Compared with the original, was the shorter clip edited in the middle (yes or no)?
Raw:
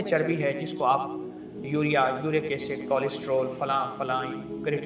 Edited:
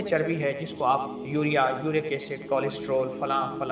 yes